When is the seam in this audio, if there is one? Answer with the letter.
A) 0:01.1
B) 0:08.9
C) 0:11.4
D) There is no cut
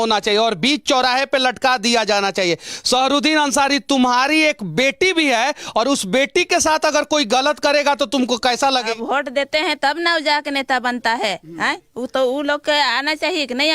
B